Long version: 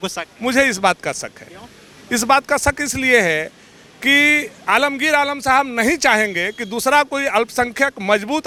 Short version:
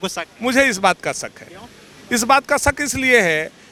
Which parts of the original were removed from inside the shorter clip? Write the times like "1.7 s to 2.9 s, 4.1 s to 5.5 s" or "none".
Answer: none